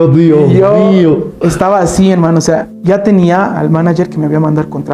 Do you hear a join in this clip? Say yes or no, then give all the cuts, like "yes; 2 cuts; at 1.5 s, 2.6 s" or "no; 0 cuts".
no; 0 cuts